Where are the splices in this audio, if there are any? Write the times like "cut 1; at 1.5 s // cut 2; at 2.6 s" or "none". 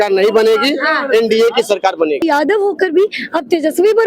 cut 1; at 2.2 s